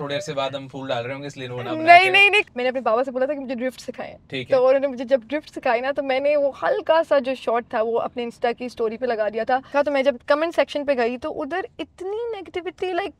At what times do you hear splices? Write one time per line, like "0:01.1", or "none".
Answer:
0:02.4
0:09.7